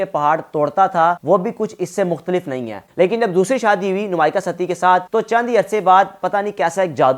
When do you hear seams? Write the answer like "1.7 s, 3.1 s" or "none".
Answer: 2.9 s